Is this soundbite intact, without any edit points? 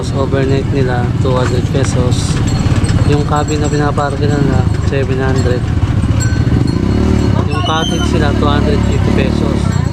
yes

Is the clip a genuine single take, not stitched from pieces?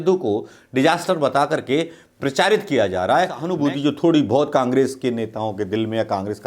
no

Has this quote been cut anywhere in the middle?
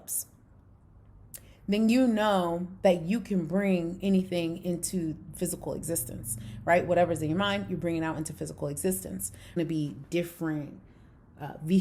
yes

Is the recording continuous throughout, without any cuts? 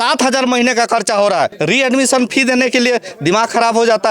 no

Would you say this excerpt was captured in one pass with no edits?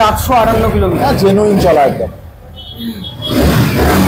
yes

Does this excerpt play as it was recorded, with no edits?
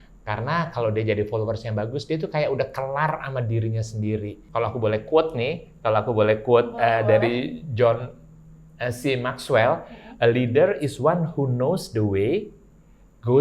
no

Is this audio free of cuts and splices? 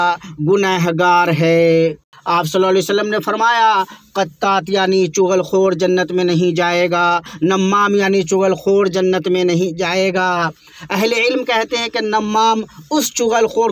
no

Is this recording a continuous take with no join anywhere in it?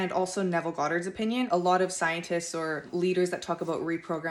no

